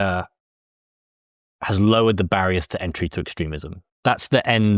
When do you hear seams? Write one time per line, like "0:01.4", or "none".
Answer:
0:03.9